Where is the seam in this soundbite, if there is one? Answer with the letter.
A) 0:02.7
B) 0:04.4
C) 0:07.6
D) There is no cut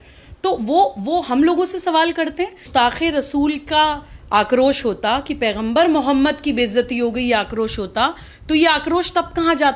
A